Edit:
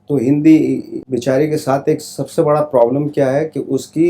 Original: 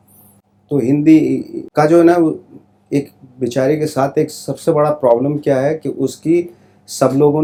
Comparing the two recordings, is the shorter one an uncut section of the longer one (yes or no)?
no